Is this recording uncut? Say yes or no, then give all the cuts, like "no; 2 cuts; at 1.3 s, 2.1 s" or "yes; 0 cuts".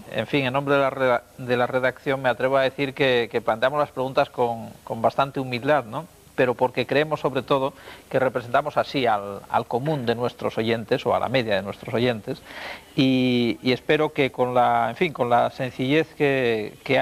no; 1 cut; at 8.3 s